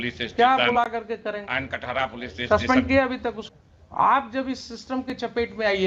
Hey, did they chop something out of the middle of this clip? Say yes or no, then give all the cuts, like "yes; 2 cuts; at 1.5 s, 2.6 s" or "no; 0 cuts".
yes; 1 cut; at 3.4 s